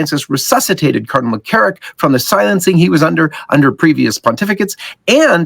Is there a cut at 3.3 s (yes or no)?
no